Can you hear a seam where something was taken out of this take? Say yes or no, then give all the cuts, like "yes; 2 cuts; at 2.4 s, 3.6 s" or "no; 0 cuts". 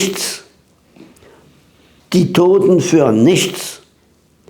yes; 1 cut; at 1.9 s